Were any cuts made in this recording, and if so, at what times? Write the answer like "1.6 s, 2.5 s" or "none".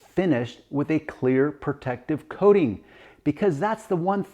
3.1 s